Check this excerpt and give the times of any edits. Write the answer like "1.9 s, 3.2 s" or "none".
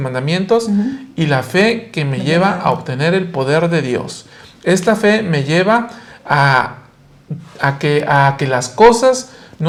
none